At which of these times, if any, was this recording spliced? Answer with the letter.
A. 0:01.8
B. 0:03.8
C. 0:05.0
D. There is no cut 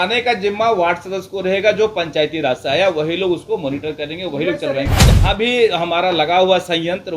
C